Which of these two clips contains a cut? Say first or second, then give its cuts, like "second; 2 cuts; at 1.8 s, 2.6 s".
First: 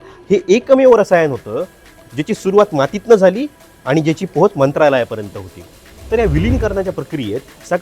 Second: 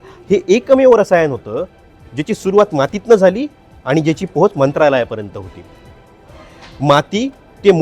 first; 1 cut; at 5.9 s